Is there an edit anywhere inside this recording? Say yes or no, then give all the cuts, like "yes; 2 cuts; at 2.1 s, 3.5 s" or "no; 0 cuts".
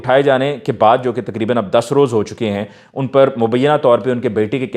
no; 0 cuts